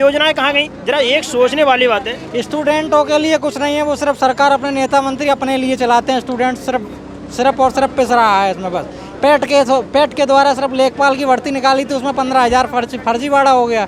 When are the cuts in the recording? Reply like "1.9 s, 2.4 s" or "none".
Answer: none